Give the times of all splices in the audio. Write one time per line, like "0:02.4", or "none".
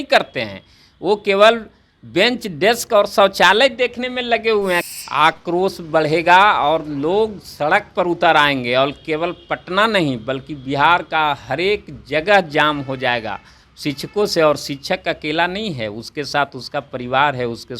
0:04.9